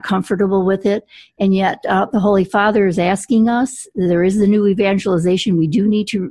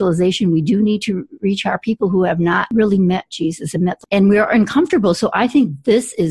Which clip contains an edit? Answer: second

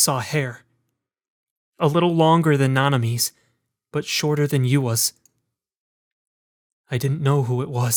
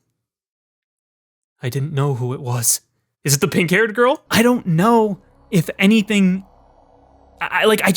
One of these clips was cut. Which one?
second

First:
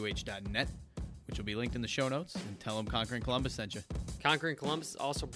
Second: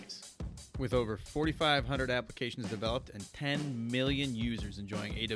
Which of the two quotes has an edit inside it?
first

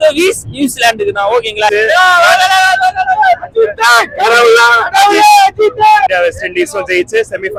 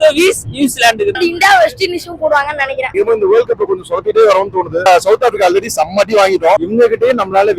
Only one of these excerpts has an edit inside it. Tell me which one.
second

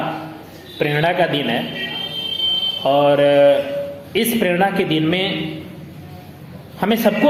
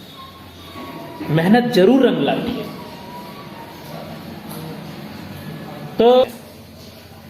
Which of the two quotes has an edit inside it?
second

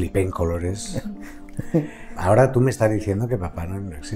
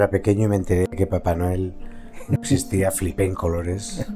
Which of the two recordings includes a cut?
first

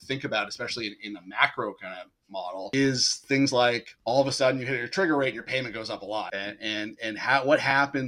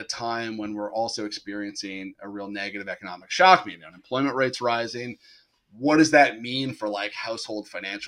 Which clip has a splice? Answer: first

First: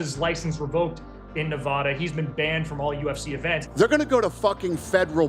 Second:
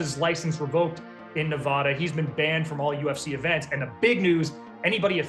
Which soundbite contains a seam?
first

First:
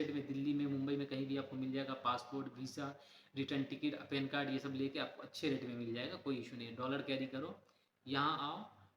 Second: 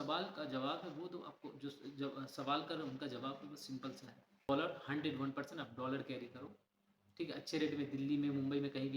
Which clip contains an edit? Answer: second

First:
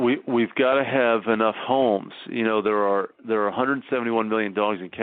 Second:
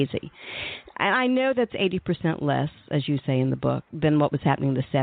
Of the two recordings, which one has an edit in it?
second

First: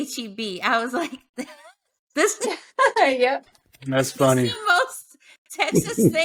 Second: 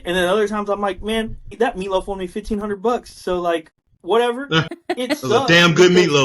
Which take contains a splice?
second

